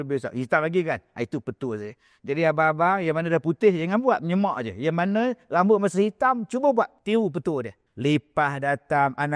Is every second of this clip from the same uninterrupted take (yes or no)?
no